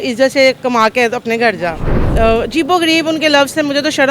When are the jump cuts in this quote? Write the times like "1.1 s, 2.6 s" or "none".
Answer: 2.0 s